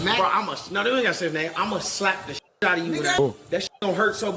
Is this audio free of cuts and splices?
no; 1 cut; at 3.2 s

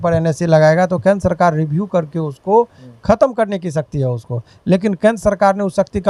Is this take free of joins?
yes; 0 cuts

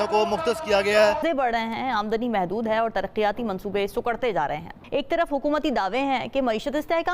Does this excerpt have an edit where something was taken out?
yes; 2 cuts; at 1.2 s, 5.1 s

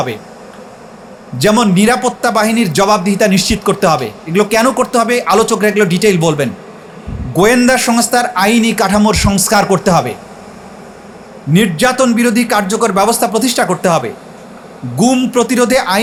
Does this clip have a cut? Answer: no; 0 cuts

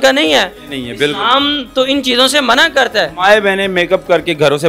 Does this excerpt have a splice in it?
no; 0 cuts

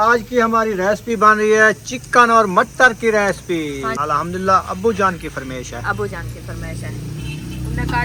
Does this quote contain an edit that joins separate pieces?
no; 0 cuts

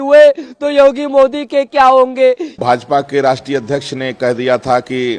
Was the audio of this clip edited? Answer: yes; 1 cut; at 2.6 s

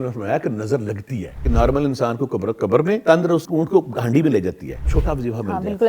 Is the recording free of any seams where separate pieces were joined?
no; 3 cuts; at 1.4 s, 3.2 s, 4.9 s

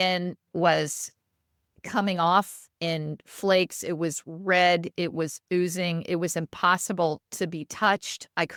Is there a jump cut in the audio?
no; 0 cuts

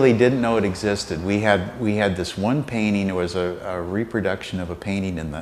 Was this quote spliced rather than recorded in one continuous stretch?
yes; 1 cut; at 1.1 s

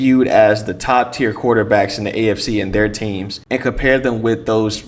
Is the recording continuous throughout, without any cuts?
no; 1 cut; at 3.3 s

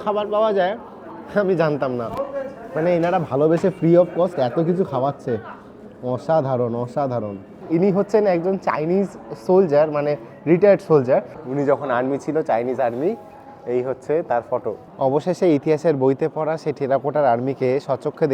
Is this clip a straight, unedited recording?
no; 3 cuts; at 7.6 s, 11.4 s, 14.9 s

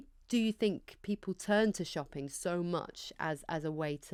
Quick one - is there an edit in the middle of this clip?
no; 0 cuts

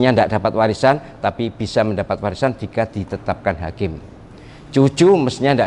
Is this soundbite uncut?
yes; 0 cuts

